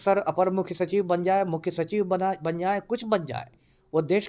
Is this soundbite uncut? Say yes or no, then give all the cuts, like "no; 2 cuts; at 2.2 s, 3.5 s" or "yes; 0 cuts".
yes; 0 cuts